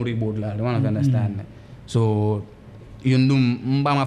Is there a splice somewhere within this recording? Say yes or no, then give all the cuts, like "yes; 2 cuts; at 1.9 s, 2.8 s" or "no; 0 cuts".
no; 0 cuts